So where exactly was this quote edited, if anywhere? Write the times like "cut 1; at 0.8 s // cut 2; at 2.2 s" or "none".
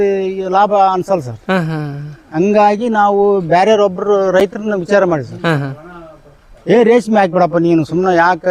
none